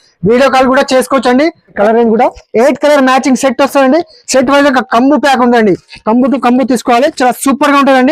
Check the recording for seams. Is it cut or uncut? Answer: cut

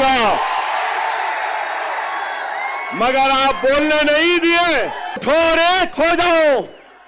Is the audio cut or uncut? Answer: cut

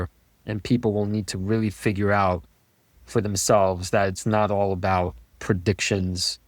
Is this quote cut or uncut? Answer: cut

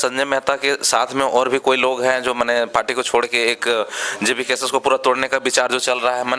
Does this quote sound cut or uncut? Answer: uncut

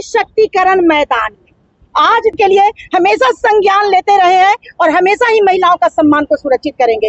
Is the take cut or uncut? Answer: cut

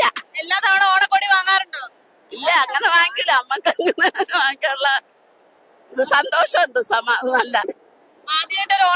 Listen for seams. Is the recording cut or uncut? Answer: uncut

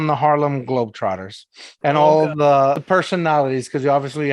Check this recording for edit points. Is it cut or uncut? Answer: cut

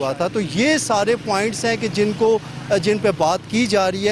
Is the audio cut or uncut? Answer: uncut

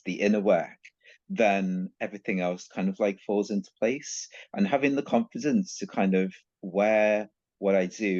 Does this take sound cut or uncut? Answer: uncut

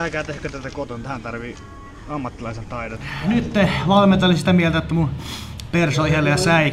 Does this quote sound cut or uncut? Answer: cut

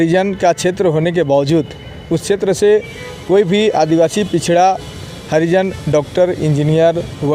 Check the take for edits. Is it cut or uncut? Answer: uncut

